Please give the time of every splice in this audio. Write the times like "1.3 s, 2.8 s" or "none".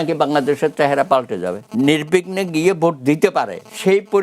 1.6 s